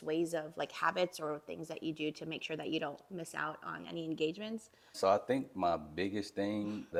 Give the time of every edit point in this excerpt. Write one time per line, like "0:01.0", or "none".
none